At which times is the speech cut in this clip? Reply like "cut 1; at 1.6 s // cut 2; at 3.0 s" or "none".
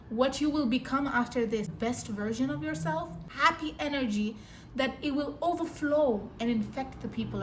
cut 1; at 1.7 s // cut 2; at 3.3 s